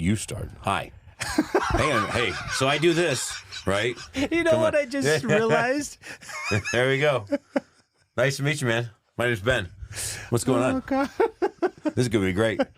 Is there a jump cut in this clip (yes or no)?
no